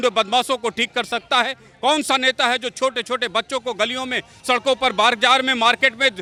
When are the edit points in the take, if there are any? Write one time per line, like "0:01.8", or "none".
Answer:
none